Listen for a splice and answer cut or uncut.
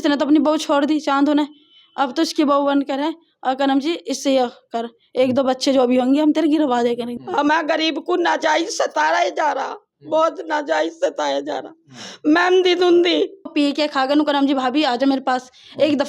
cut